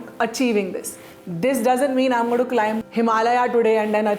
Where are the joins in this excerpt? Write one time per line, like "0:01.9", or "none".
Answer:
0:02.8